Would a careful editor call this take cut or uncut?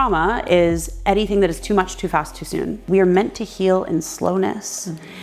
cut